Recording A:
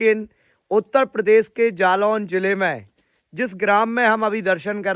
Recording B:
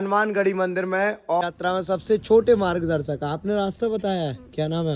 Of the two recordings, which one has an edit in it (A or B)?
B